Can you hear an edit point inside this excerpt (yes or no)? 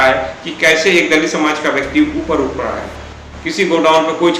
yes